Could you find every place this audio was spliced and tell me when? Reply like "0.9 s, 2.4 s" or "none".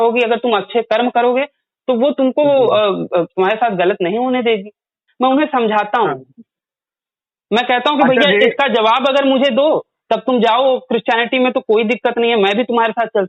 5.0 s